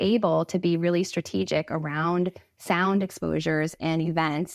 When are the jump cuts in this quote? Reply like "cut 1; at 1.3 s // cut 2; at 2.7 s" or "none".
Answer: none